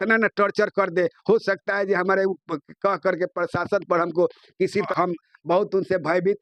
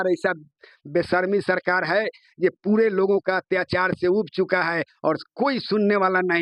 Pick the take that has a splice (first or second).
first